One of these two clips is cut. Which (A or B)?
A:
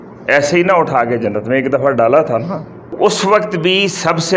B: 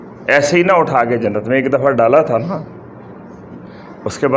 A